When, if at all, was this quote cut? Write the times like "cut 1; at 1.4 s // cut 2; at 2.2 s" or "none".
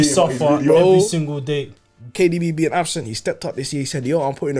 cut 1; at 1.7 s